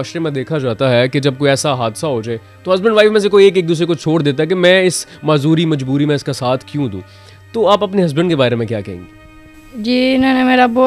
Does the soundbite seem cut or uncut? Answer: uncut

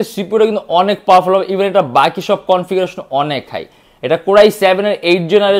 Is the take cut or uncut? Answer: uncut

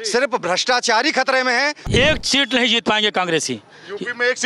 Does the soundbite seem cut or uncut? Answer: cut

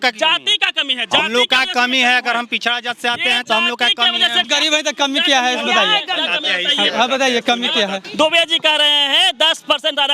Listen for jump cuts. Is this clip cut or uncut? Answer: cut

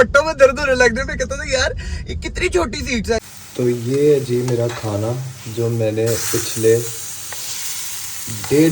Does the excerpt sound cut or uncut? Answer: cut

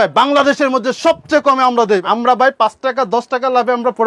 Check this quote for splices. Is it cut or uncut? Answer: cut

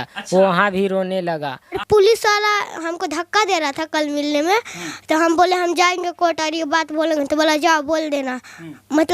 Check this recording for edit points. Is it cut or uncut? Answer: cut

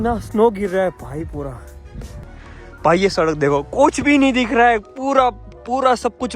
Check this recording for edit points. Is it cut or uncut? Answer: cut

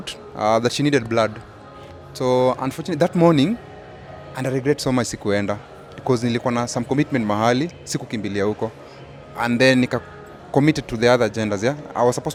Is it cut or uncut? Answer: uncut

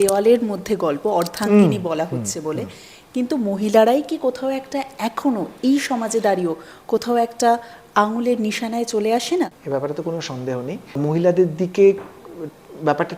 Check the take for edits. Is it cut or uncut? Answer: cut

